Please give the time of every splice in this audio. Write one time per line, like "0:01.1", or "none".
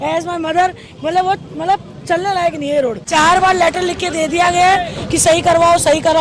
0:03.0